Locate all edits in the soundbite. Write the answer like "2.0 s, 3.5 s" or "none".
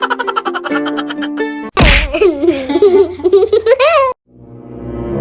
4.2 s